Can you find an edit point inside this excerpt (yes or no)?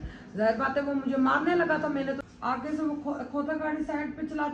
yes